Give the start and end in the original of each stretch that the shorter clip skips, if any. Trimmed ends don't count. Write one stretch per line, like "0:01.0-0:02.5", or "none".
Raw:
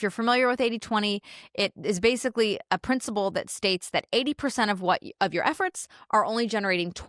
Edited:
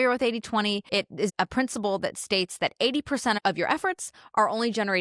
0:01.6-0:02.6
0:04.7-0:05.1